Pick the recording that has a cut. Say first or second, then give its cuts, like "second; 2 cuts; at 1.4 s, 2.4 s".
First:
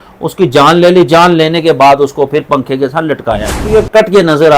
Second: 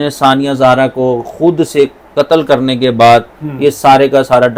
first; 1 cut; at 3.6 s